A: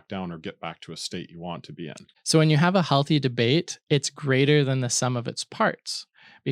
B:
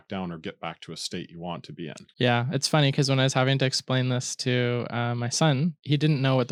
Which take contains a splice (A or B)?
A